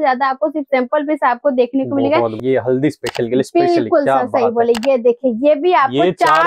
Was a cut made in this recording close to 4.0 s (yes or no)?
no